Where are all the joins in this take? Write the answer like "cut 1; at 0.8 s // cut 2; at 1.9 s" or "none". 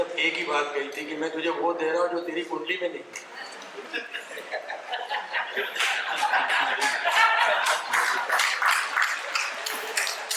none